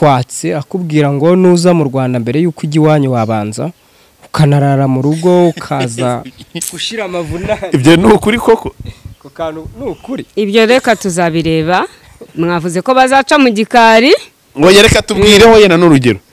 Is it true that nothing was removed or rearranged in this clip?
yes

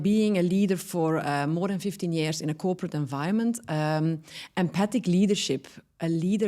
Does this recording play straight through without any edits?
yes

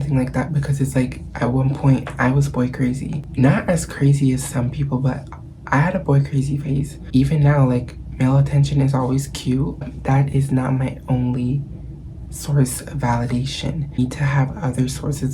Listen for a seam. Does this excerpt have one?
yes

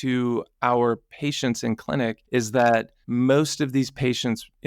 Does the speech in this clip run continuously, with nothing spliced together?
no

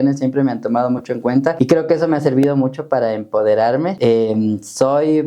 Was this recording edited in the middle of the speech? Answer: yes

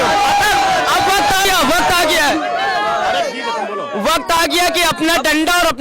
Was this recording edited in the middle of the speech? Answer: yes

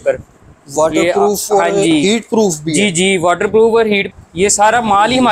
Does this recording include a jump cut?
yes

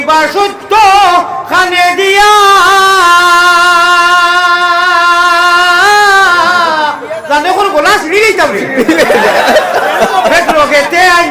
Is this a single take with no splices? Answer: yes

